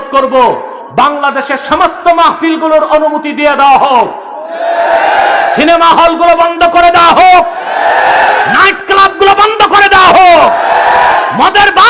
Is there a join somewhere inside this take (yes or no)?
no